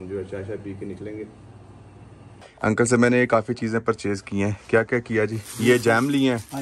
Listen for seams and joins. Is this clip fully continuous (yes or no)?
no